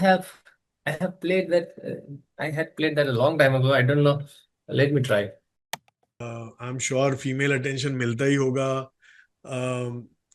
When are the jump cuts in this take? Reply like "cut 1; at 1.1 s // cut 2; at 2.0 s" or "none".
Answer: cut 1; at 6.0 s